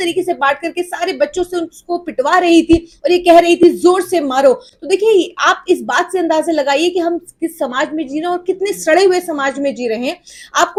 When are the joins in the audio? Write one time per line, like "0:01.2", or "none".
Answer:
none